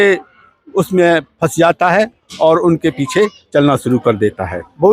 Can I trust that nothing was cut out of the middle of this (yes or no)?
yes